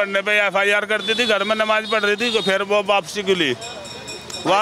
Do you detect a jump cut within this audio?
no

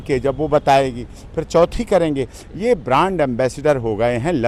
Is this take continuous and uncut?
yes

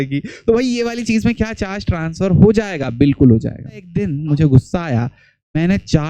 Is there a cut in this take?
yes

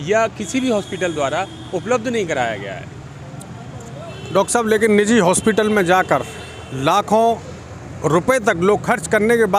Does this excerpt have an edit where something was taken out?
no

